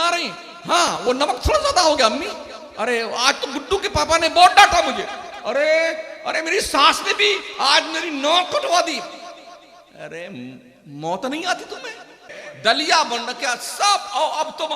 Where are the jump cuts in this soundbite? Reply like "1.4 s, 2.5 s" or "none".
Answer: 12.5 s